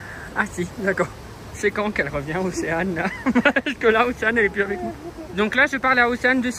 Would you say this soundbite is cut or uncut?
uncut